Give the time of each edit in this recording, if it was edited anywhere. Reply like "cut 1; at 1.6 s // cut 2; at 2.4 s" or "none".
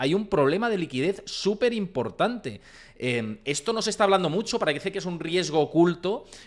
none